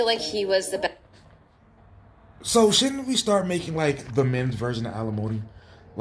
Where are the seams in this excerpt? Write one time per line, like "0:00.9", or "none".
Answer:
none